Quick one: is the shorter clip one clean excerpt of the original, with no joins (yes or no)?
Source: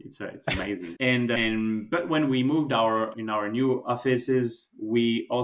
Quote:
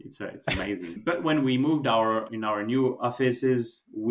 no